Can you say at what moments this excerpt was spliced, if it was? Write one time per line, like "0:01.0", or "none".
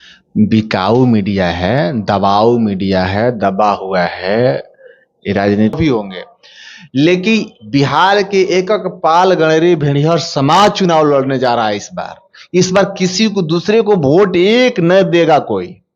0:05.8